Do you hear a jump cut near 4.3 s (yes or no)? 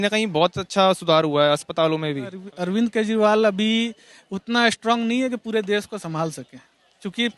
no